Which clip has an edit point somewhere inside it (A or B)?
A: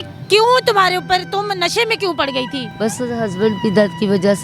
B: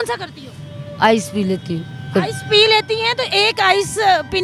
A